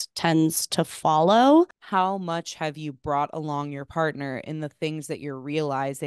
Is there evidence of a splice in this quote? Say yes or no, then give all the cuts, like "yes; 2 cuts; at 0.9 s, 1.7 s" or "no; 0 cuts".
yes; 1 cut; at 1.8 s